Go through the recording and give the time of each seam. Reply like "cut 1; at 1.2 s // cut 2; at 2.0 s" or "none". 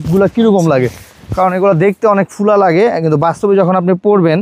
none